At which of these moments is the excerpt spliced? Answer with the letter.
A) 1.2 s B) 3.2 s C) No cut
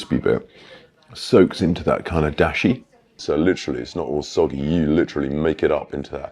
B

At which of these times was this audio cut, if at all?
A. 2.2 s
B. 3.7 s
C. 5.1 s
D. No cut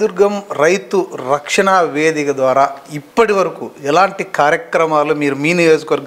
D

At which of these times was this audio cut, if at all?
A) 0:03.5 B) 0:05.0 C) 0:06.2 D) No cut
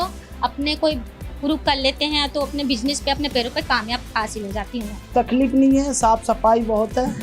B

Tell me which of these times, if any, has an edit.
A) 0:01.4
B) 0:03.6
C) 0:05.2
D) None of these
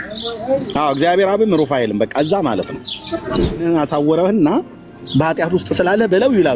B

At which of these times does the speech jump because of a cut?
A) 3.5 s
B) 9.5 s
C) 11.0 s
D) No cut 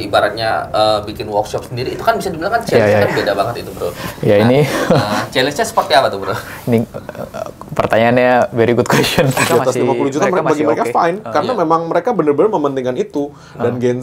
B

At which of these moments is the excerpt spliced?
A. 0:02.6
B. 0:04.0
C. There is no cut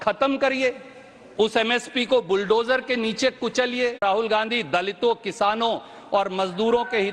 B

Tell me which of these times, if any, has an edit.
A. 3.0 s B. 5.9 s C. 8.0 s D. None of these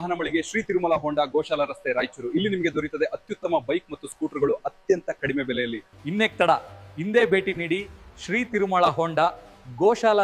B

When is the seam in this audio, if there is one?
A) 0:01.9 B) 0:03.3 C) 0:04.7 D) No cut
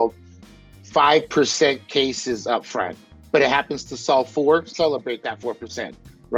D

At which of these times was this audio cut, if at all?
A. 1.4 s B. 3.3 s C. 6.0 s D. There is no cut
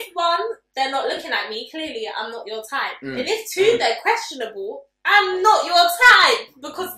D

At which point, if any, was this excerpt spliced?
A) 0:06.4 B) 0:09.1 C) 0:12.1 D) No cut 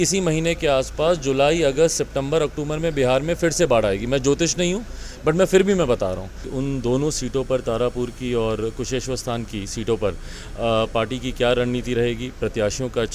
A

